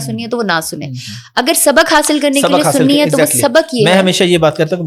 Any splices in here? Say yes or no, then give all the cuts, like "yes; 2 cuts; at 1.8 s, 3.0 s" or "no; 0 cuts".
no; 0 cuts